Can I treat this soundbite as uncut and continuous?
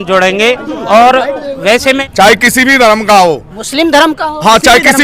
no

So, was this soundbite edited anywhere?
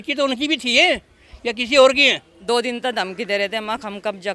yes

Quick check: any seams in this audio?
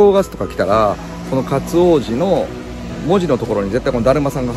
no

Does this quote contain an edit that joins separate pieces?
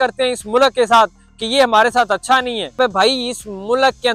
yes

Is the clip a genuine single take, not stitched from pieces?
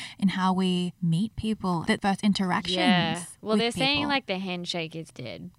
no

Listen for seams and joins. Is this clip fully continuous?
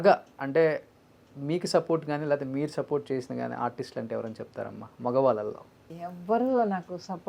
no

